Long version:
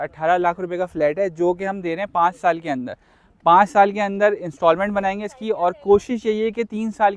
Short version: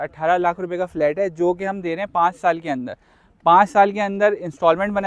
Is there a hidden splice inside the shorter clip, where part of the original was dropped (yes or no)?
no